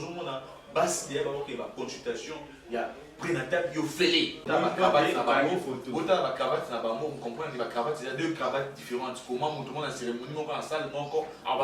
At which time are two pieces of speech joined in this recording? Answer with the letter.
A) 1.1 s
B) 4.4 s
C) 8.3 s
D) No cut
B